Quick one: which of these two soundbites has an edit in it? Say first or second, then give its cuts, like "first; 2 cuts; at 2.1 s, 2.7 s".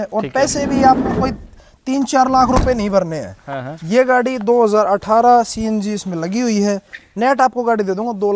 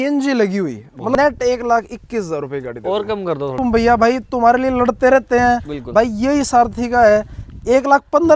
second; 2 cuts; at 1.1 s, 3.5 s